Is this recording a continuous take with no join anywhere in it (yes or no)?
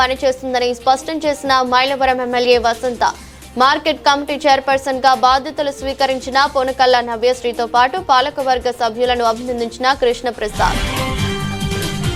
yes